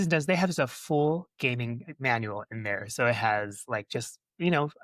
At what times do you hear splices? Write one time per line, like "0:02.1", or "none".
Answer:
none